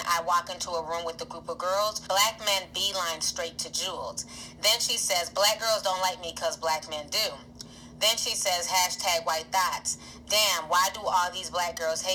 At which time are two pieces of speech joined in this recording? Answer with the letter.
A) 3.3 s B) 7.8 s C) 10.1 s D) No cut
D